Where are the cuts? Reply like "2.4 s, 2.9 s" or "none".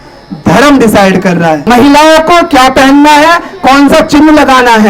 1.6 s